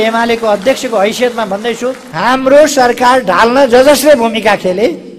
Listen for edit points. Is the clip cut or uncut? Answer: cut